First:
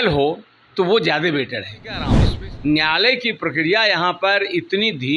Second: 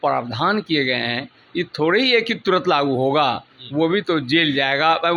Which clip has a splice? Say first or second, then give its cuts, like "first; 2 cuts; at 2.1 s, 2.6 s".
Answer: first; 1 cut; at 2.2 s